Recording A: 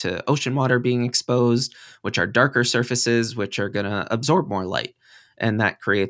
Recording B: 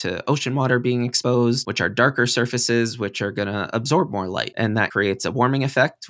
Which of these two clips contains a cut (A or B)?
B